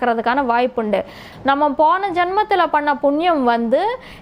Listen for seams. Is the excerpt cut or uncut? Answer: cut